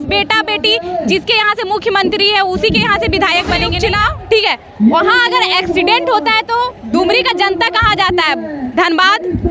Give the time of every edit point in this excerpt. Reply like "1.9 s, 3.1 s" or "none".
3.7 s